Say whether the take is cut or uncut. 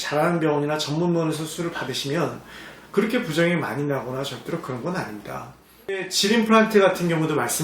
cut